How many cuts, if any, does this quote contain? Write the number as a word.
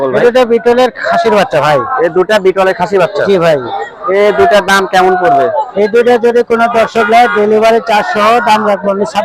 zero